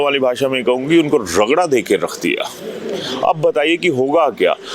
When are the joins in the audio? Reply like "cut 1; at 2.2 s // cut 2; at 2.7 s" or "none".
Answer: none